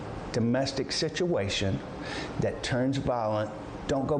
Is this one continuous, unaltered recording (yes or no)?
yes